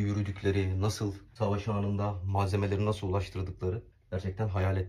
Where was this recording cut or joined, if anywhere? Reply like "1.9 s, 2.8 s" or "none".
1.2 s, 3.9 s